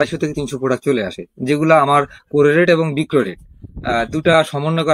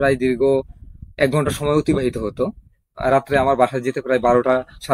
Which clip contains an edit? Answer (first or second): second